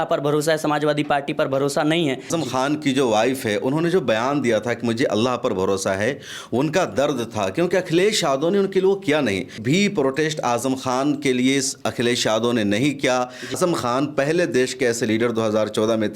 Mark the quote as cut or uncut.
cut